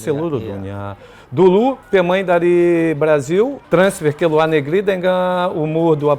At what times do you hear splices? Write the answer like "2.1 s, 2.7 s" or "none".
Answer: 3.6 s

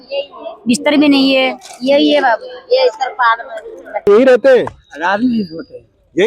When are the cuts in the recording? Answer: 4.1 s

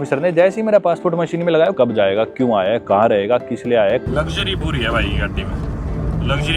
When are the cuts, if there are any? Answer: 1.7 s, 4.1 s

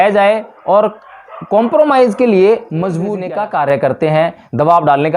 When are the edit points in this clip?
3.1 s

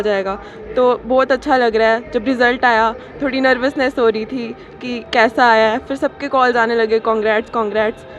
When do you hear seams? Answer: none

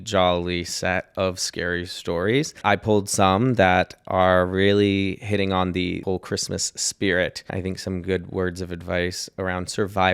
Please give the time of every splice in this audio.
2.6 s, 6.0 s, 7.5 s

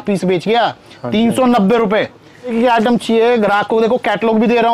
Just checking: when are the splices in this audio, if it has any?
2.5 s

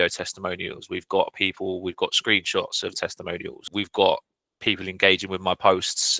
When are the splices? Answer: 3.6 s

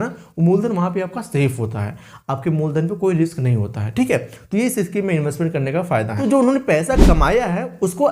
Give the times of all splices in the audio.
6.1 s

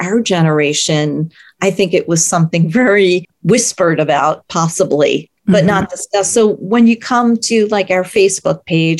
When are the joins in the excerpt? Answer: 5.3 s

